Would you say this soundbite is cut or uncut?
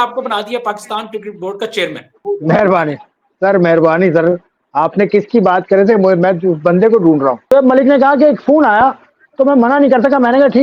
cut